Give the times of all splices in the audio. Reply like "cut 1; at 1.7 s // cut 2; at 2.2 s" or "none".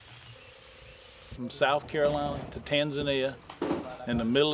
cut 1; at 1.4 s // cut 2; at 3.5 s